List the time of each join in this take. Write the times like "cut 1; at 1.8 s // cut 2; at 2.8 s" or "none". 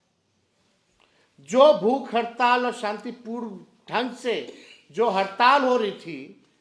none